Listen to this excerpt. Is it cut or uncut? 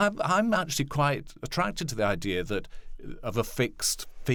uncut